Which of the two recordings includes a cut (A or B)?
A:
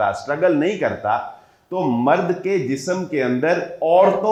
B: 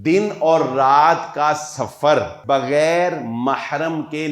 B